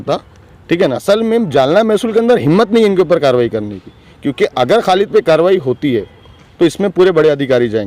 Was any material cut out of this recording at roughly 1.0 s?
yes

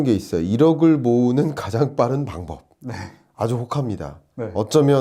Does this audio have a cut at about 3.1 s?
no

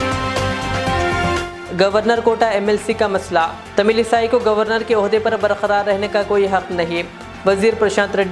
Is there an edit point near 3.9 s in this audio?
no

